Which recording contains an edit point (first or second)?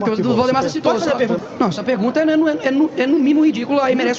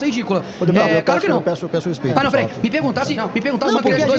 first